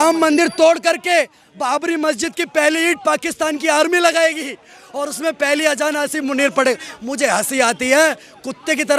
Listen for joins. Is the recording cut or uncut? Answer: uncut